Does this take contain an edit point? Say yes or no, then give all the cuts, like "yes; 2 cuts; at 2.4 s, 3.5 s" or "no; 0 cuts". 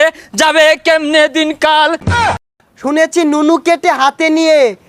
yes; 1 cut; at 2.2 s